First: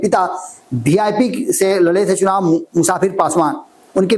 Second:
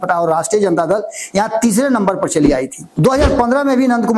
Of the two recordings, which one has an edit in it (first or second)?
second